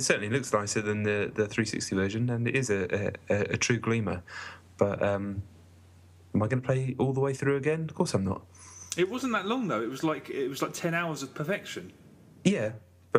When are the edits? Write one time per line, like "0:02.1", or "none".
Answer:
none

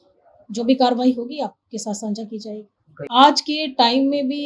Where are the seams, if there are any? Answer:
0:03.1

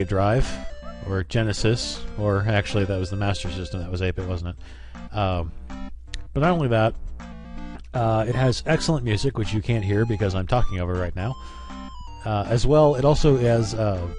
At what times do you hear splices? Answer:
0:10.3

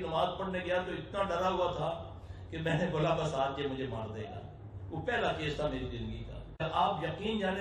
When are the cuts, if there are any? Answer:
0:06.6

